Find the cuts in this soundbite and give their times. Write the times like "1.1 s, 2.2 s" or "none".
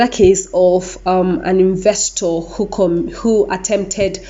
none